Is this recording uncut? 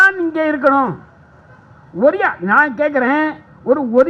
yes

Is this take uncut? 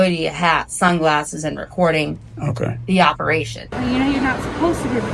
no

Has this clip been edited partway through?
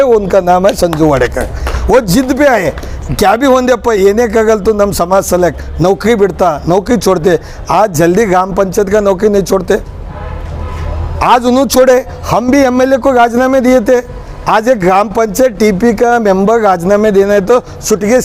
no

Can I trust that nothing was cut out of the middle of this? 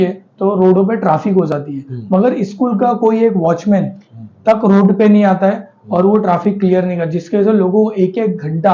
yes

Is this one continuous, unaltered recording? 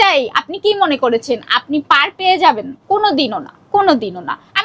no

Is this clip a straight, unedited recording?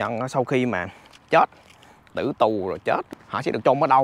no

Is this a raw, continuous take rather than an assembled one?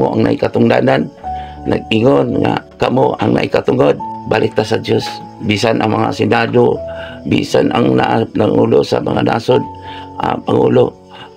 no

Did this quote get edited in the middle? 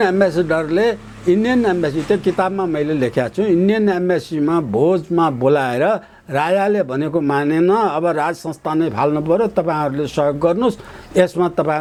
no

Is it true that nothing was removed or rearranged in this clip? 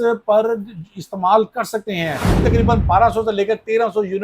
no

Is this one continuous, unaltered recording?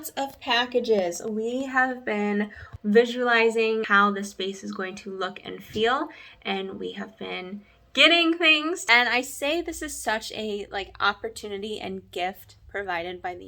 no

